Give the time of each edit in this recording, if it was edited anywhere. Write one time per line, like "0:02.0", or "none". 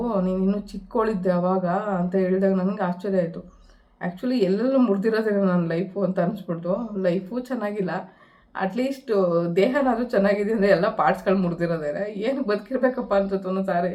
none